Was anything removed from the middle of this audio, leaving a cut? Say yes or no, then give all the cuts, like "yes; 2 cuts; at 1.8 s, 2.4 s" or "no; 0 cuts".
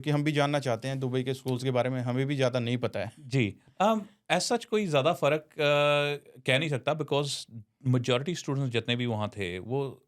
no; 0 cuts